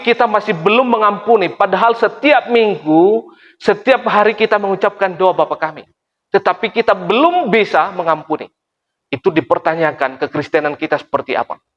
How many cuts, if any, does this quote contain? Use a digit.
0